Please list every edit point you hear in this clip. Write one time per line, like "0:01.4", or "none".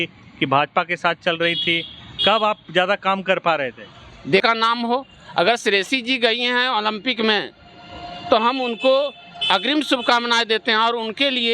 0:04.4